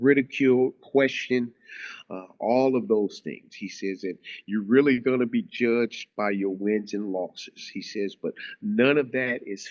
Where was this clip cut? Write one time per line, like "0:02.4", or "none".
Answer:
none